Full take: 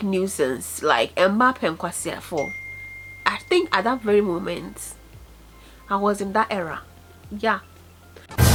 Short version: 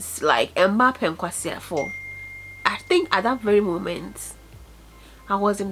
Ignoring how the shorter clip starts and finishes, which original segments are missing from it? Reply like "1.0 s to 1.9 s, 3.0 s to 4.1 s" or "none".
none